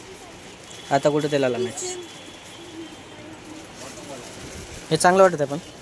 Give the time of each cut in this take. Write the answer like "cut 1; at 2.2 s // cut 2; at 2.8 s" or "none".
none